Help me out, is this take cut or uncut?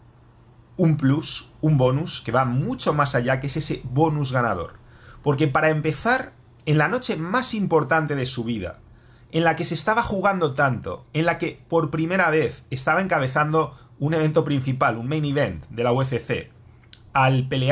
uncut